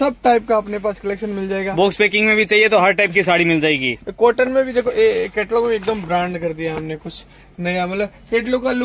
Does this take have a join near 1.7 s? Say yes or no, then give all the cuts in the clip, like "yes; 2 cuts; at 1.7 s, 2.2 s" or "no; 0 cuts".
no; 0 cuts